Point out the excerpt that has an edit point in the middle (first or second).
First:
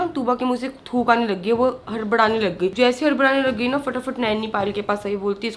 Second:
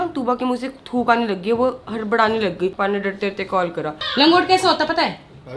second